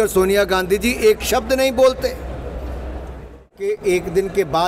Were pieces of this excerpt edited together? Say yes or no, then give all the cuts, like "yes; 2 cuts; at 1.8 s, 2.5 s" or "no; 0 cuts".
yes; 1 cut; at 3.7 s